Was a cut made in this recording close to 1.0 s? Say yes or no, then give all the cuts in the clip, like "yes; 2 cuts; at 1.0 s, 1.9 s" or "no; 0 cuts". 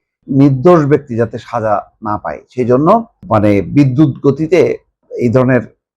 no; 2 cuts; at 3.2 s, 5.1 s